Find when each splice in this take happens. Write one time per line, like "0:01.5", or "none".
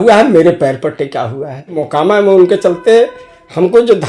0:01.8